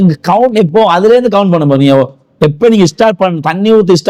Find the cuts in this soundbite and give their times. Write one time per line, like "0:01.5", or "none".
none